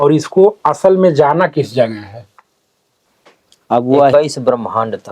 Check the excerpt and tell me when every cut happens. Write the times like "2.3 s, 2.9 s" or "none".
4.1 s